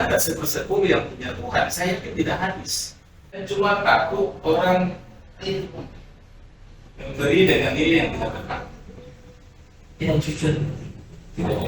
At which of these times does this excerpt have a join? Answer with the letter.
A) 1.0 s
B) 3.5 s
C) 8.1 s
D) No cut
B